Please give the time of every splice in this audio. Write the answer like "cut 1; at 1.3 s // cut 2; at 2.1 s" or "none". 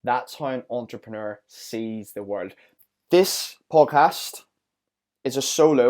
cut 1; at 2.7 s